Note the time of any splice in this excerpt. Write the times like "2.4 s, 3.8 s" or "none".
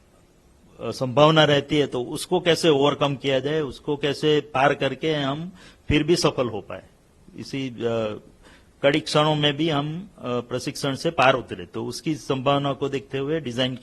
none